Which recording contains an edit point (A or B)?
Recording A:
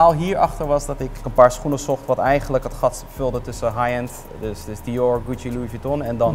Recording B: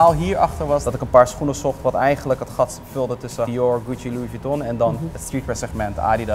B